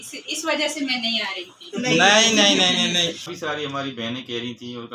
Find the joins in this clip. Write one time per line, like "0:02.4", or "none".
0:03.3